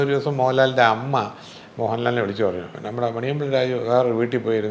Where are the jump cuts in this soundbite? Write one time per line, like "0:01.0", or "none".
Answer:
0:02.7